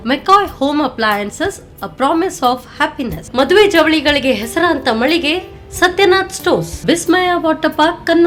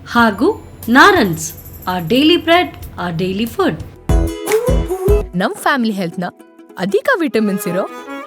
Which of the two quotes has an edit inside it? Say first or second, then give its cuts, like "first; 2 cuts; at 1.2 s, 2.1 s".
second; 1 cut; at 3.9 s